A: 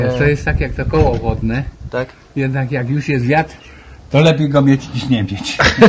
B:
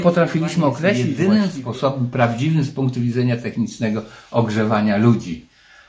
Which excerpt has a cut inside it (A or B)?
B